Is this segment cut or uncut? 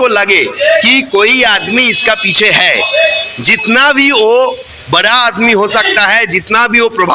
uncut